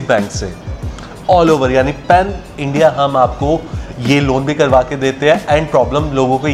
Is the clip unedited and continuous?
yes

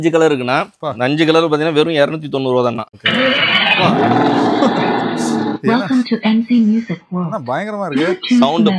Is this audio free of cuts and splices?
no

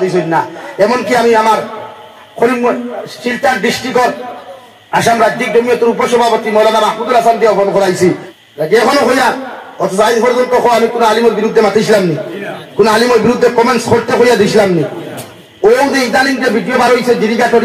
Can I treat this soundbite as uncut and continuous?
no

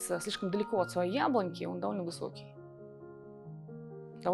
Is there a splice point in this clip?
no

